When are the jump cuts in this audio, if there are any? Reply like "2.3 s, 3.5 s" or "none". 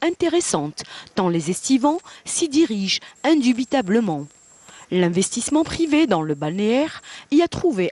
none